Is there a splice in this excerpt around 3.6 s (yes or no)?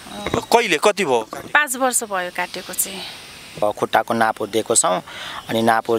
yes